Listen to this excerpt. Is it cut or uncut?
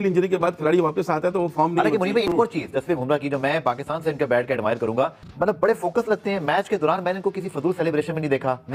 uncut